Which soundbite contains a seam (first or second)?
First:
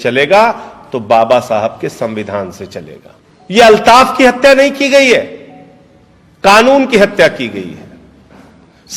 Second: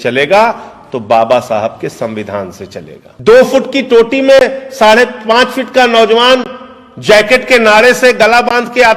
second